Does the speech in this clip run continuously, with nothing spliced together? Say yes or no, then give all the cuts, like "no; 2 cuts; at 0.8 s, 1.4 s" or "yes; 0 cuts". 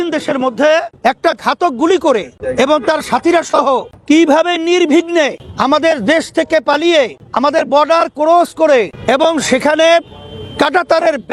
no; 6 cuts; at 0.9 s, 2.4 s, 3.9 s, 5.5 s, 7.2 s, 8.9 s